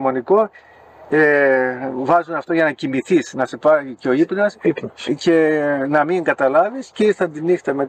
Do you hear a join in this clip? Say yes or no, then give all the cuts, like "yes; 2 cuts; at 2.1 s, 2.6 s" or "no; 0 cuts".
no; 0 cuts